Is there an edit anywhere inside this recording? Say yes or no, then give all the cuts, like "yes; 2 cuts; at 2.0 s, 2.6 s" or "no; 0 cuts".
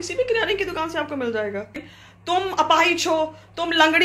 yes; 1 cut; at 1.9 s